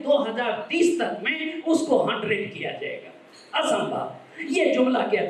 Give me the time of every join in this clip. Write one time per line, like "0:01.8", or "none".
none